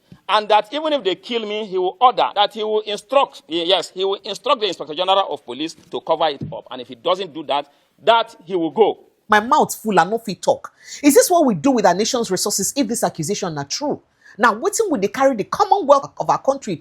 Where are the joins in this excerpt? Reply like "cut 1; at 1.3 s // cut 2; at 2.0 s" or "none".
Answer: cut 1; at 2.3 s // cut 2; at 9.3 s // cut 3; at 16.0 s